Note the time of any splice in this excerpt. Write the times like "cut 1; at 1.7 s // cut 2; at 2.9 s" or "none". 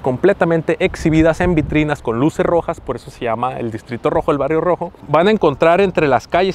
none